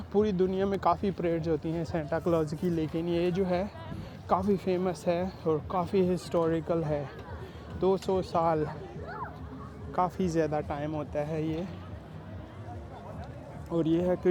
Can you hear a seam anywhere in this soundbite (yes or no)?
no